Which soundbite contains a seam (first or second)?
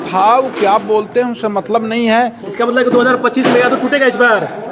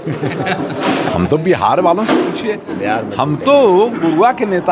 first